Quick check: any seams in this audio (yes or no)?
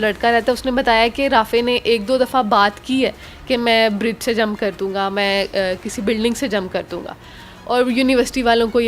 no